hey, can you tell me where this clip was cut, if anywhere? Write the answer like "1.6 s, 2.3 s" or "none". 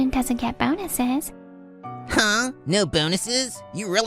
1.9 s